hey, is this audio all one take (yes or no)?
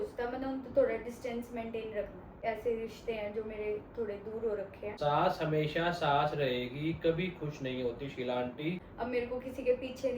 no